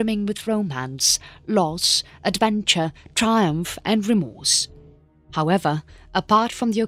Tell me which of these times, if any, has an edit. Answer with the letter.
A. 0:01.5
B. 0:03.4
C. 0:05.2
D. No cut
D